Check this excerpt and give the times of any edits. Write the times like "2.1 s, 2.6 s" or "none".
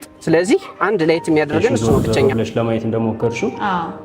2.3 s